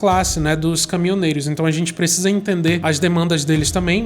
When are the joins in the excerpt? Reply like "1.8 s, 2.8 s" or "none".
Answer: 2.8 s